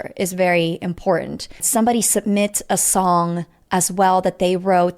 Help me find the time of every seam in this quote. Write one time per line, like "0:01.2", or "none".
0:01.6